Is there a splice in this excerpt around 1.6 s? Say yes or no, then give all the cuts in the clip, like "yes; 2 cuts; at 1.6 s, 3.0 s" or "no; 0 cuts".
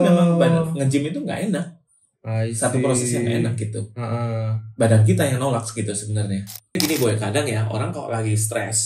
no; 1 cut; at 6.8 s